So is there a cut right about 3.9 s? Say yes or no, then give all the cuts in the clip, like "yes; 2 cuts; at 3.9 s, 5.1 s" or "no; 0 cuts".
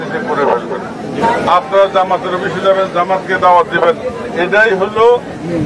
no; 1 cut; at 1.1 s